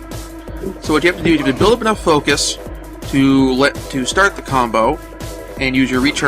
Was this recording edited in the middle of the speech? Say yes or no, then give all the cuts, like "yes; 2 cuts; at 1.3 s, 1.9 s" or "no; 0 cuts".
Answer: yes; 1 cut; at 1.7 s